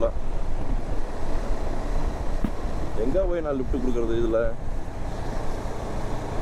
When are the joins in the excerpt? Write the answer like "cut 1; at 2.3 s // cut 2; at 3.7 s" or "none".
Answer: none